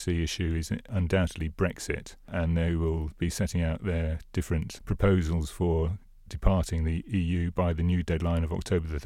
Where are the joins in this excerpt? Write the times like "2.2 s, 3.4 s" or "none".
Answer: 0.9 s, 2.3 s, 4.8 s, 7.0 s

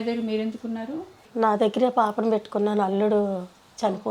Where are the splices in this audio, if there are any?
1.2 s

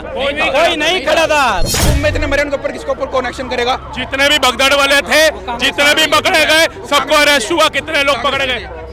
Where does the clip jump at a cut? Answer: 1.7 s

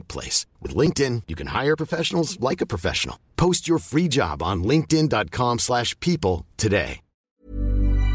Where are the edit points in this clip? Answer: 7.2 s

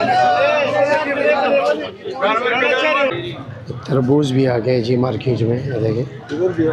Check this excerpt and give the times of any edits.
3.3 s

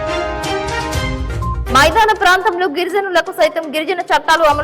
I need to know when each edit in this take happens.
1.6 s

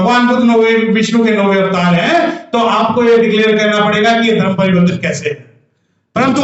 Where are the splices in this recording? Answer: none

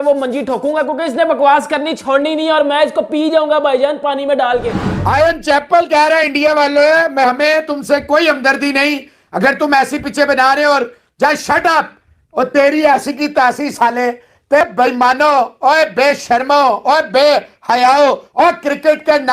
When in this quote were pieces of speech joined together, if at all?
none

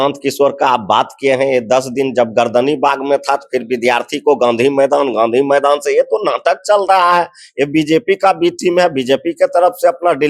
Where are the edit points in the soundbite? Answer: none

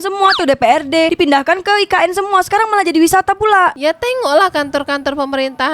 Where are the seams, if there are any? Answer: 3.8 s

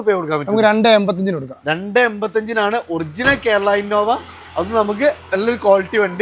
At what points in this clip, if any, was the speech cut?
none

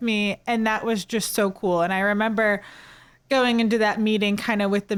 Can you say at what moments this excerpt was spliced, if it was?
none

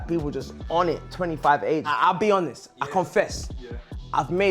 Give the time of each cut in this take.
1.9 s

